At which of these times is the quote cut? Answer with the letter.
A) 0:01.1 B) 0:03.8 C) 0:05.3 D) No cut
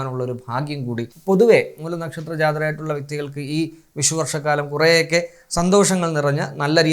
A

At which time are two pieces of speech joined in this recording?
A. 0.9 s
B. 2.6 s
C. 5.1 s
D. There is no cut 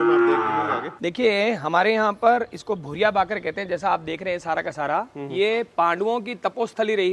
A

